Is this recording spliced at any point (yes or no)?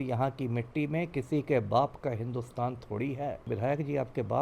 yes